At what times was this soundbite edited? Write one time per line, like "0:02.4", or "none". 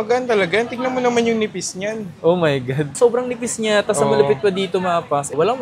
none